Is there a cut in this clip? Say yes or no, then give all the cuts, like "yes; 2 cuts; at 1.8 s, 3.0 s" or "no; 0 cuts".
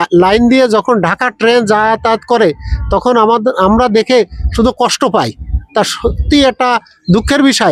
no; 0 cuts